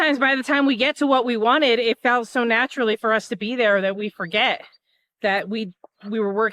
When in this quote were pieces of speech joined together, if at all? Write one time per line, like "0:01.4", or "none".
none